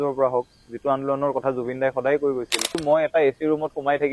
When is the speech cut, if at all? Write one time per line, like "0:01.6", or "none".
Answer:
0:02.8